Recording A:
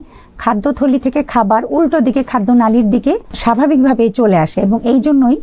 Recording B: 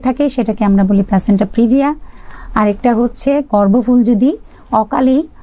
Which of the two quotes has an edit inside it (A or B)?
A